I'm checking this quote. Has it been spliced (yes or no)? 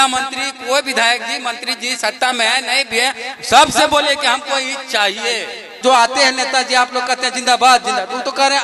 yes